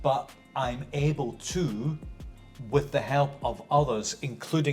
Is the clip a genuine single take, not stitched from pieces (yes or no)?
yes